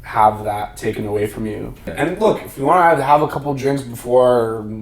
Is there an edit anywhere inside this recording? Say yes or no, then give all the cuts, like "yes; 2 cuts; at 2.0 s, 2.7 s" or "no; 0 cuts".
yes; 1 cut; at 1.8 s